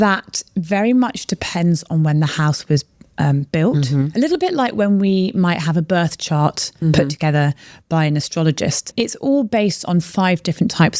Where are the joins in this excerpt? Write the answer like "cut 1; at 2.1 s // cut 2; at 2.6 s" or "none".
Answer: cut 1; at 8.9 s